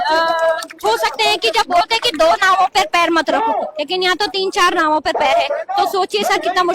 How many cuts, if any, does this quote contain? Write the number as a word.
zero